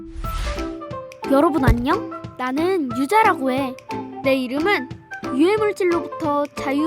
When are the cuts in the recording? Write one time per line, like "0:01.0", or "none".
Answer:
none